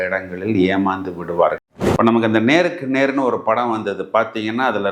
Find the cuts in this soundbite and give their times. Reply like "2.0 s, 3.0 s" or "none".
1.6 s